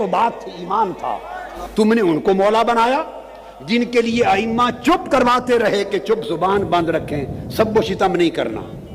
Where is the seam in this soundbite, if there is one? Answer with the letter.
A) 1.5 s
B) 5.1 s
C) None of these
A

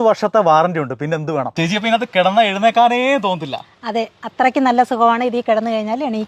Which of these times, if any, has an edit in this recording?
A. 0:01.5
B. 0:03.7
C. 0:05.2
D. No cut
A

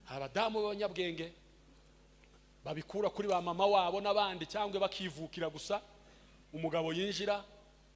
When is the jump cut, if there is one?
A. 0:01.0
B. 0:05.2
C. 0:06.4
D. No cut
D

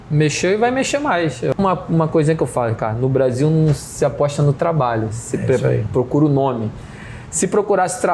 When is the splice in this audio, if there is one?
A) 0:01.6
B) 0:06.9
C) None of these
A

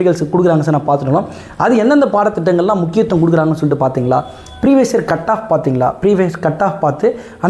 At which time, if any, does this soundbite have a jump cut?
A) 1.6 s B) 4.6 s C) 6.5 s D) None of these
D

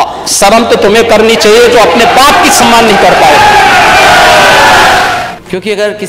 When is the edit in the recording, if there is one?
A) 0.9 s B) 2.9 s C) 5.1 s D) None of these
C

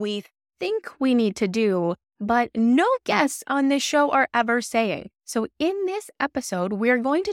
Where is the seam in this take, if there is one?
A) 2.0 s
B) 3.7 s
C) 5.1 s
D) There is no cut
C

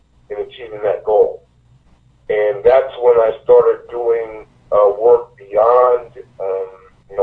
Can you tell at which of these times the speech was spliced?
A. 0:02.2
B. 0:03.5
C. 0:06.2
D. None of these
D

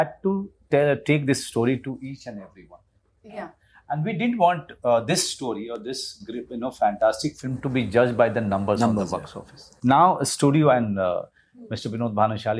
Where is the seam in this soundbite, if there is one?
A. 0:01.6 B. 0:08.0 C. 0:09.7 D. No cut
C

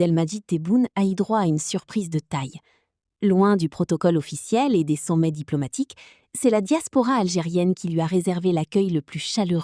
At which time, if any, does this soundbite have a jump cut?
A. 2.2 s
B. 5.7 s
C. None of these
C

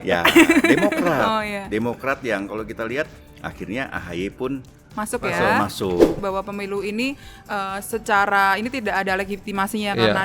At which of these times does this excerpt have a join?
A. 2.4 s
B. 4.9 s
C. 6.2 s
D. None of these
C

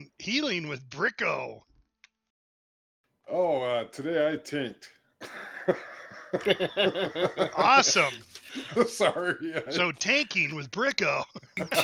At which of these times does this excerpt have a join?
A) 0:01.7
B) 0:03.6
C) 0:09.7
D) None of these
A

